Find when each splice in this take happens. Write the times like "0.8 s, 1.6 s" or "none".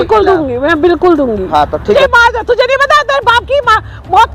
1.9 s